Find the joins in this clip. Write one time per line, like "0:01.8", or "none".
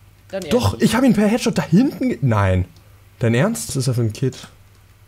0:03.7